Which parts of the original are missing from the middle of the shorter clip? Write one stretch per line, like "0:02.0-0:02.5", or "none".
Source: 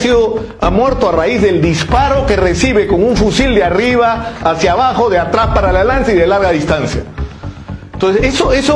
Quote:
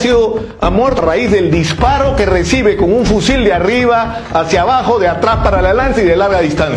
0:01.0-0:01.1